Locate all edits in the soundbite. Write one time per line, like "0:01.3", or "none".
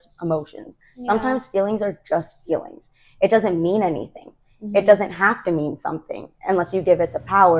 none

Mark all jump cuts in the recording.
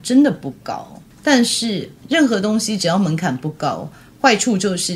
none

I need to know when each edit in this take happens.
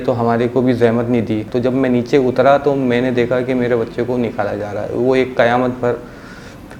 0:01.4

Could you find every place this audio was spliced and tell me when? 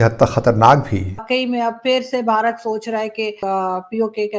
0:01.2
0:03.4

